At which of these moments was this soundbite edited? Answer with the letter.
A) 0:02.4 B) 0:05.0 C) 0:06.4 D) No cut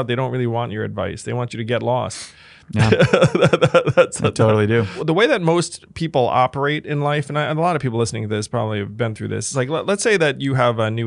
B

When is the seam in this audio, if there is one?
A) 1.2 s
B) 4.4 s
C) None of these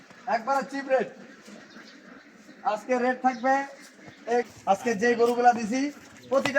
B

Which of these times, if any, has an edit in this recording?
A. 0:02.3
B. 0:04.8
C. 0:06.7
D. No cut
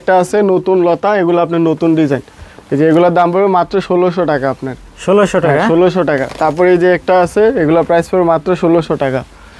D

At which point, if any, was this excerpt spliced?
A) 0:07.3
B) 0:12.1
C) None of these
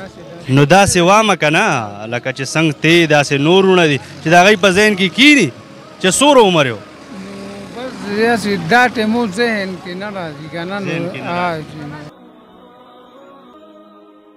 C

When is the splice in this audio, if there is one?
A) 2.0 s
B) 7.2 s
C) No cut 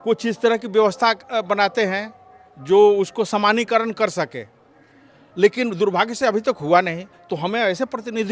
C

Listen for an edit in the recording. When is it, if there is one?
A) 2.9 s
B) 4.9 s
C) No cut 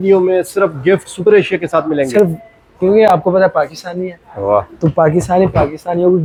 C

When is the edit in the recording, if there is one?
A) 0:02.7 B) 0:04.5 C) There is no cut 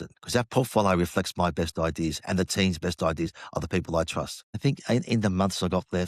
B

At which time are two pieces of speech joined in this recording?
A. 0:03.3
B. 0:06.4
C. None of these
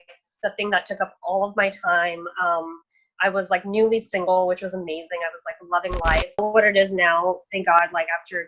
B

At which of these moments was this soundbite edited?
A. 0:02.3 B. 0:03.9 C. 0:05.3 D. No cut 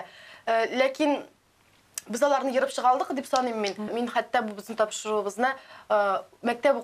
B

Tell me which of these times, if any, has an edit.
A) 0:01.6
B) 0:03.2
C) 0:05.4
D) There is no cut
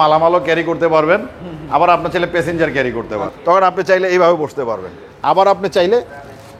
B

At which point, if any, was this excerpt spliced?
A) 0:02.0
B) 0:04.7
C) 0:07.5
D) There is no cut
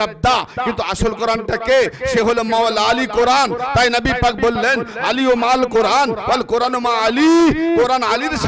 D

